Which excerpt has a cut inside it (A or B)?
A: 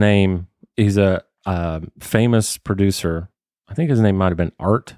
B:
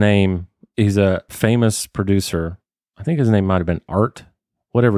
B